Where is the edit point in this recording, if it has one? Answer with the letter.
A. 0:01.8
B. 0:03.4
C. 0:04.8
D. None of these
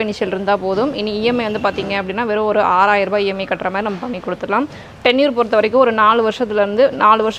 D